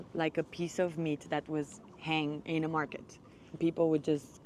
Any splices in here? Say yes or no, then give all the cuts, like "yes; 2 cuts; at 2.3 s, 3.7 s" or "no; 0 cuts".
no; 0 cuts